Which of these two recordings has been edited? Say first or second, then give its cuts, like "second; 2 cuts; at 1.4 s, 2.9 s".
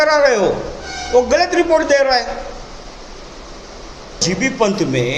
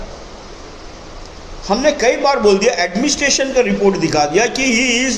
first; 1 cut; at 4.2 s